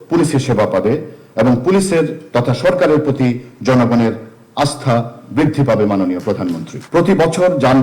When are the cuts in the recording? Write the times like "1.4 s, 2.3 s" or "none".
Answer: 6.7 s

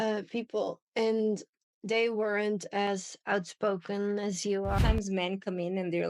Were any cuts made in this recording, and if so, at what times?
4.8 s

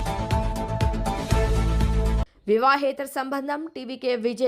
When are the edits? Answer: 2.3 s

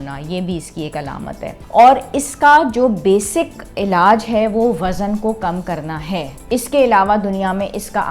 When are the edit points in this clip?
1.6 s, 6.4 s

